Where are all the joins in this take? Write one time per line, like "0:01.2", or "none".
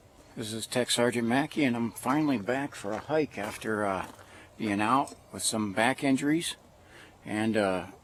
none